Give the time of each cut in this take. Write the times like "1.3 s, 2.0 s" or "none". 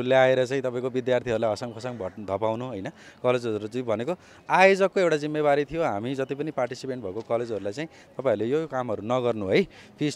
none